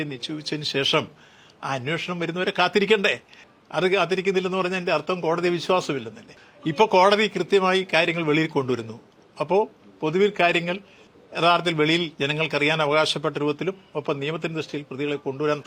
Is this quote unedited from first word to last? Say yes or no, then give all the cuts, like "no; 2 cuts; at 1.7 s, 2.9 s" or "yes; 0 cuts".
yes; 0 cuts